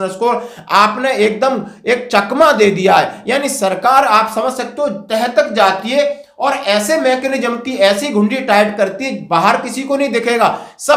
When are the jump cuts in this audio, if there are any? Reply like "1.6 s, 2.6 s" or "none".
none